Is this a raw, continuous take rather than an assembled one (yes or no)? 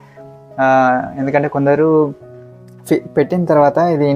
yes